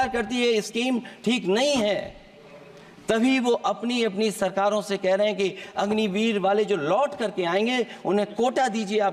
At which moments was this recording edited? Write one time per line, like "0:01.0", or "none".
none